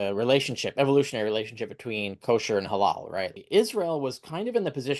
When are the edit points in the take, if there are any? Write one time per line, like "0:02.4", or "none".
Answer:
0:03.4